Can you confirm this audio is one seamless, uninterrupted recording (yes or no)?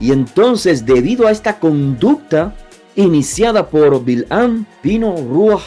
no